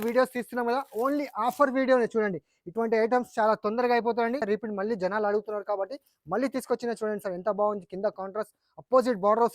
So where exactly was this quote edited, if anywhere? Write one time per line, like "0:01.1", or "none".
0:04.4